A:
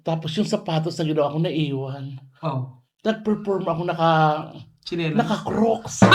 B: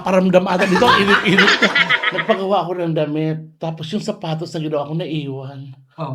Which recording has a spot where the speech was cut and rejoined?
B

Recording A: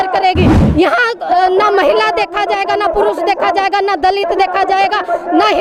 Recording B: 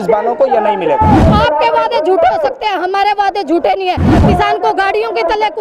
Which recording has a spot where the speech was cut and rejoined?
B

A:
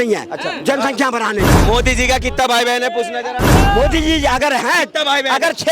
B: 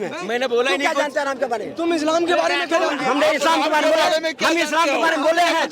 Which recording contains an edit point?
A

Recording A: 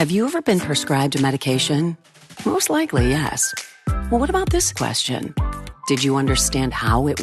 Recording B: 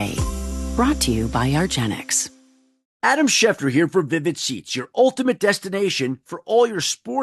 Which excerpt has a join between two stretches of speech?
B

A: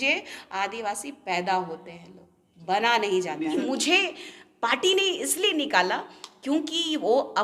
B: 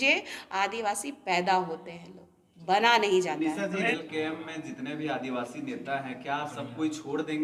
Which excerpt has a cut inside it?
A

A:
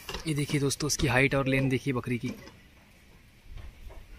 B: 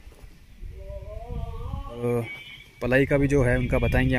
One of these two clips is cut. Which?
B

